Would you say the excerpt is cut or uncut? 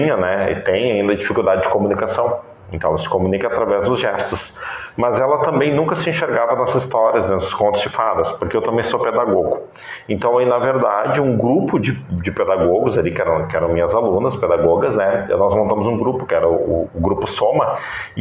uncut